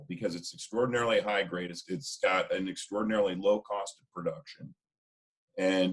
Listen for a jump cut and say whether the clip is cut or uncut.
cut